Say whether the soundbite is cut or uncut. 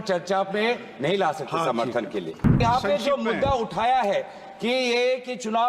cut